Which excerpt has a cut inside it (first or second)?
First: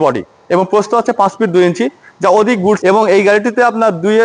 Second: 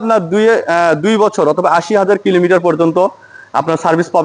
first